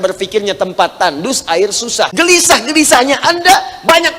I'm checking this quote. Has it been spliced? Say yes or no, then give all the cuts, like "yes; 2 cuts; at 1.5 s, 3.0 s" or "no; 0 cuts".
yes; 1 cut; at 2.1 s